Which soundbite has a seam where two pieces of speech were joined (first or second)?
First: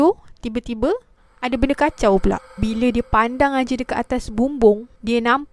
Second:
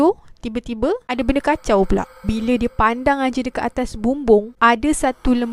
second